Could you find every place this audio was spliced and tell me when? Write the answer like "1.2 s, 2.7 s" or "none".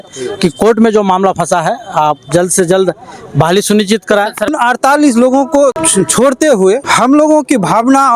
4.5 s, 5.8 s, 6.9 s